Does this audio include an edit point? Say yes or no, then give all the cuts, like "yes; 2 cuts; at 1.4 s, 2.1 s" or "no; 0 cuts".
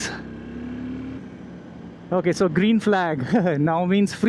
yes; 1 cut; at 1.2 s